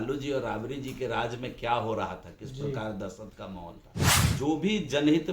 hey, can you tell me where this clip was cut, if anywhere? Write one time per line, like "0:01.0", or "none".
0:04.3